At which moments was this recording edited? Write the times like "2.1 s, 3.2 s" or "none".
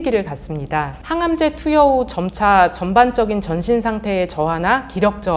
1.0 s